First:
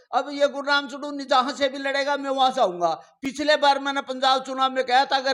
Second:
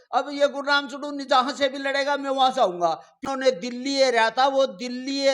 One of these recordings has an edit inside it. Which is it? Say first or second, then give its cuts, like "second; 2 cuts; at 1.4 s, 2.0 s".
second; 1 cut; at 3.2 s